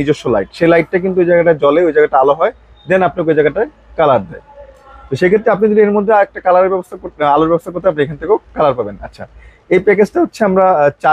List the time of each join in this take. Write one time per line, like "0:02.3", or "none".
none